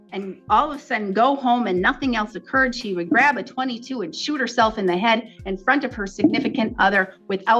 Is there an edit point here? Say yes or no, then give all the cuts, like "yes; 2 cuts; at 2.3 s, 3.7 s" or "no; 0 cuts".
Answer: no; 0 cuts